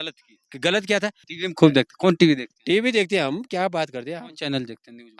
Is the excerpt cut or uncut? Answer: cut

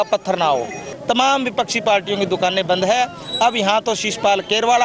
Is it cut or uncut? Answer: cut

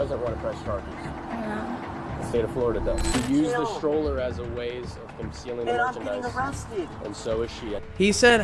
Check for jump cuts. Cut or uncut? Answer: cut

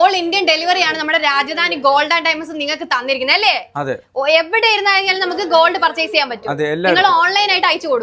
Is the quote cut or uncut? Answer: uncut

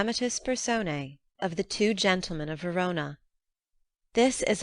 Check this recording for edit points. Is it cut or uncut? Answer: cut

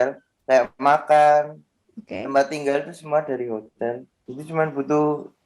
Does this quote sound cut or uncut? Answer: cut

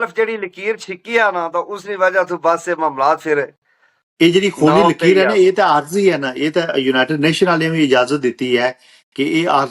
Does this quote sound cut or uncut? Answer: uncut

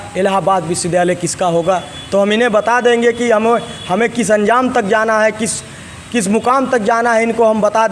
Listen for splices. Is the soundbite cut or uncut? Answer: uncut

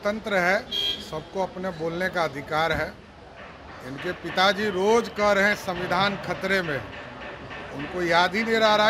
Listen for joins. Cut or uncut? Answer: uncut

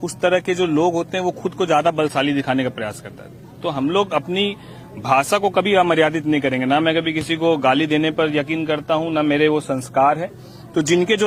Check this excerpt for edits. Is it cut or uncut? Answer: uncut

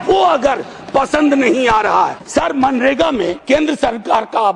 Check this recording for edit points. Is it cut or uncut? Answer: cut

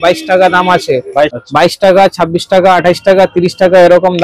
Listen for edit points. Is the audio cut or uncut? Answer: cut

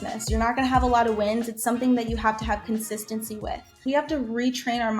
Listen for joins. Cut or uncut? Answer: cut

